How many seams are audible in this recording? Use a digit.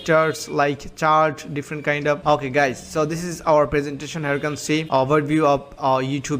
2